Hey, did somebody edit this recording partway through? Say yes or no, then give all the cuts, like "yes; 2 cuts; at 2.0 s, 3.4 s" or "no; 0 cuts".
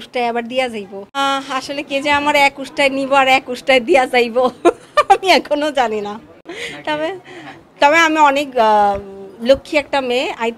yes; 1 cut; at 1.0 s